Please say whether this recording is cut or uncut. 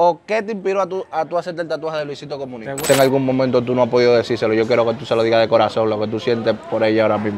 cut